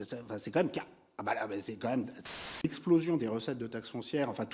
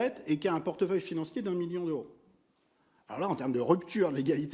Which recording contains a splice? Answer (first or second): first